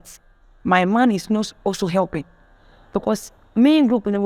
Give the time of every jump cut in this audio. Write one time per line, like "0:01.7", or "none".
none